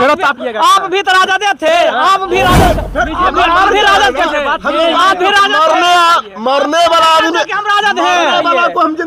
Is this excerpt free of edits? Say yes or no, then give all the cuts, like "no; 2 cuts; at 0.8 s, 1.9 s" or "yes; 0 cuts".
yes; 0 cuts